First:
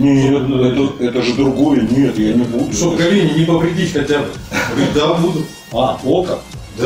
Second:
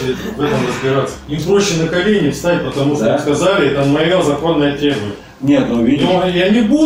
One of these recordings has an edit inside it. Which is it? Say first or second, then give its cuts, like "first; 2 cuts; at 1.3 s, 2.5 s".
second; 1 cut; at 1.2 s